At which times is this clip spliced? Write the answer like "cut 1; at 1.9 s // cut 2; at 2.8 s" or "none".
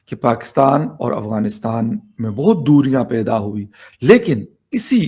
none